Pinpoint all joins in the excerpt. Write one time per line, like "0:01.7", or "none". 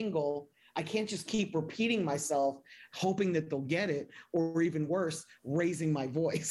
none